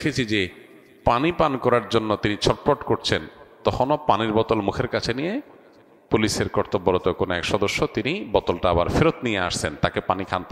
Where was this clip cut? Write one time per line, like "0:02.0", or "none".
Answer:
none